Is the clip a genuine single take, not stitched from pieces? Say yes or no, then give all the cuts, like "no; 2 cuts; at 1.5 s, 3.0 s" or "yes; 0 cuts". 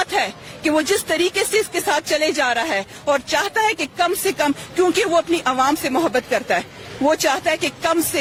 yes; 0 cuts